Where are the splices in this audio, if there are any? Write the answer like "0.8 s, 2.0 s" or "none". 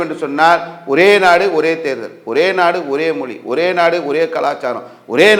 none